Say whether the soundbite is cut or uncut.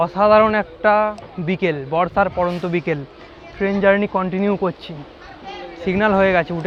uncut